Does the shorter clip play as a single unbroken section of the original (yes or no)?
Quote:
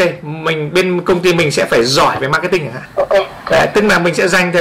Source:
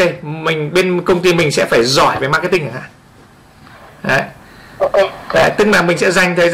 no